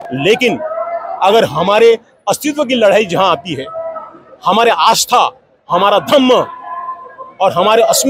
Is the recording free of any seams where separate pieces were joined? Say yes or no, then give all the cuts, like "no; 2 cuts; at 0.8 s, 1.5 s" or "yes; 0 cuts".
yes; 0 cuts